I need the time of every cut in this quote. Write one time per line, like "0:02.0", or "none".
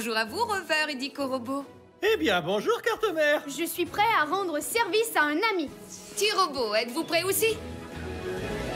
0:07.6